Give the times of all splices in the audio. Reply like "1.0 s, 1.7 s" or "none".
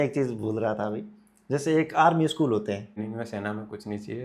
3.0 s